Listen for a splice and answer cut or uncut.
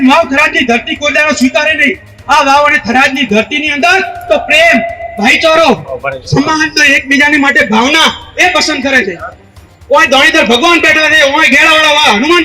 uncut